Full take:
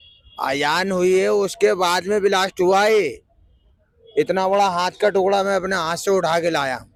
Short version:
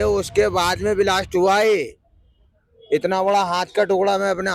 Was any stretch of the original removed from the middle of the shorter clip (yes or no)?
no